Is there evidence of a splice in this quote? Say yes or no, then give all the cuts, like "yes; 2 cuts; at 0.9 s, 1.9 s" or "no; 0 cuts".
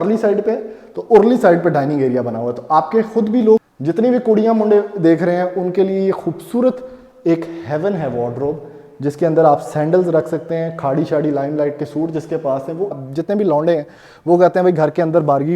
yes; 2 cuts; at 3.7 s, 13.0 s